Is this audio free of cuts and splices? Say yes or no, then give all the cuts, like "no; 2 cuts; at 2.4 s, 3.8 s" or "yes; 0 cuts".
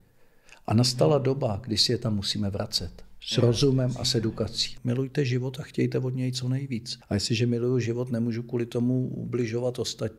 no; 2 cuts; at 4.7 s, 6.9 s